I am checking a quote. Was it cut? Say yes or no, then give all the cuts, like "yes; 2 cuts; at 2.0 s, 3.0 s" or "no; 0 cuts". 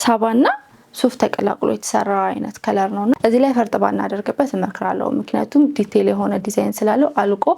yes; 1 cut; at 3.2 s